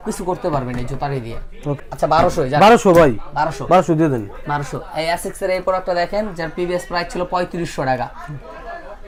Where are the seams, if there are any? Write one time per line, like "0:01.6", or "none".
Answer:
none